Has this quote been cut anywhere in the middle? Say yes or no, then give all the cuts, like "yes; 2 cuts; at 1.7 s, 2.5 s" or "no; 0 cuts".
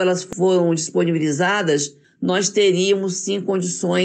no; 0 cuts